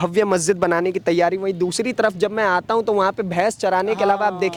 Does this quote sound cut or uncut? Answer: uncut